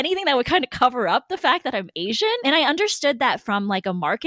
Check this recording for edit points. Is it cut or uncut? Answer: uncut